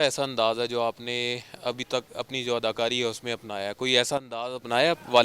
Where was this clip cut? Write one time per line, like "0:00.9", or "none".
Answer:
none